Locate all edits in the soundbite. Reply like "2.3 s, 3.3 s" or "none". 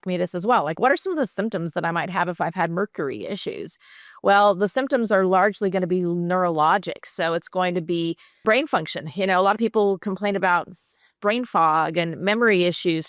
none